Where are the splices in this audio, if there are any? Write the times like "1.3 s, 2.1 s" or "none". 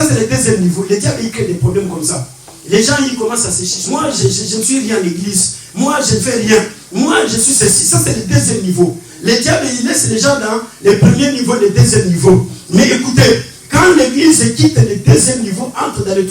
3.7 s